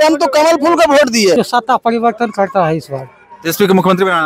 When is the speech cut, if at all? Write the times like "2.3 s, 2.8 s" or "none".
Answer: 1.4 s

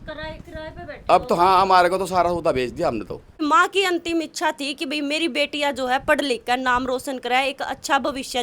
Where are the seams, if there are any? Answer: 3.4 s

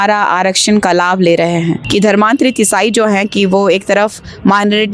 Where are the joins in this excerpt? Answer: 1.8 s

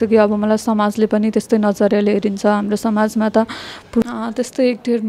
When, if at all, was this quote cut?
4.0 s

